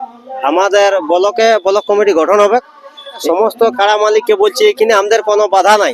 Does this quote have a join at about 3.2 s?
yes; 1 cut; at 3.2 s

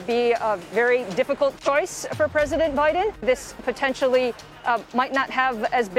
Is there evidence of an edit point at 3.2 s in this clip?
yes; 1 cut; at 3.2 s

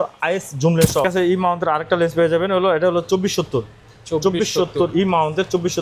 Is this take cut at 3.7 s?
no; 1 cut; at 1.0 s

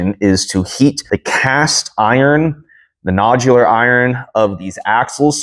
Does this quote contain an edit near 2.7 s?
no; 1 cut; at 1.0 s

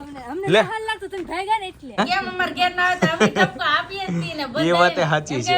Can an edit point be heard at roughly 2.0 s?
yes; 1 cut; at 2.0 s

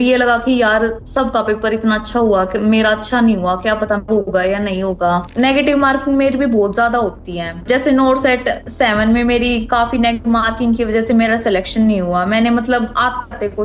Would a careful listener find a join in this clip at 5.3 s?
yes; 2 cuts; at 5.3 s, 7.6 s

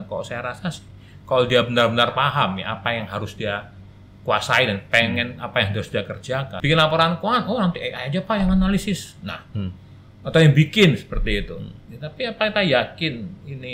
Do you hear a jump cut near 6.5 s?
yes; 1 cut; at 6.5 s

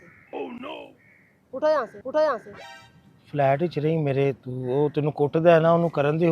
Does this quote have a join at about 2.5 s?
no; 0 cuts

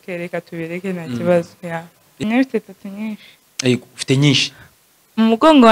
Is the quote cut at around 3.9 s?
no; 1 cut; at 2.1 s

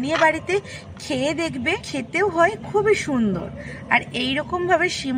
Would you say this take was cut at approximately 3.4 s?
no; 1 cut; at 1.9 s

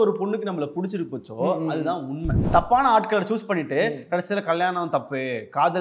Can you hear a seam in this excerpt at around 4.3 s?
no; 1 cut; at 2.5 s

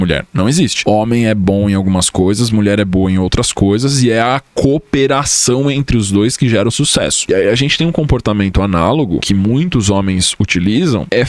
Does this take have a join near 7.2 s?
yes; 1 cut; at 7.2 s

